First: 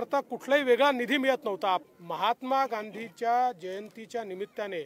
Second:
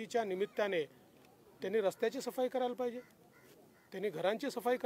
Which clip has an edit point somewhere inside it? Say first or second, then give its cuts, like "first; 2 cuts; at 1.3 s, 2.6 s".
first; 1 cut; at 1.8 s